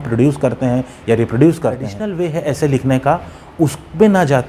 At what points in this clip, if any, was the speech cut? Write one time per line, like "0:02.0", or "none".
0:02.0